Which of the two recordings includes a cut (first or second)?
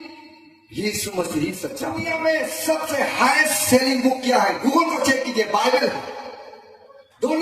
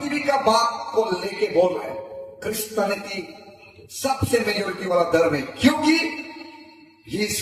first